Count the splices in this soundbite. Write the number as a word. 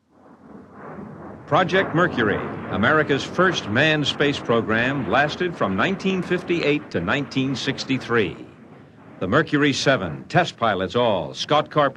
zero